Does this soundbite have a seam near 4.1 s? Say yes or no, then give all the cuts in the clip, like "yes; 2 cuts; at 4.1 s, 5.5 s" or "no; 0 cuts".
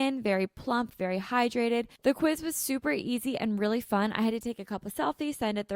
no; 1 cut; at 1.9 s